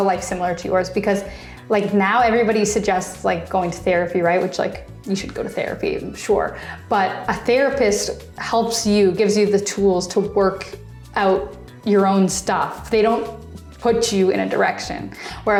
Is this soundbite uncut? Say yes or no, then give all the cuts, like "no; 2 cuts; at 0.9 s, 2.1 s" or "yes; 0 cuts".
yes; 0 cuts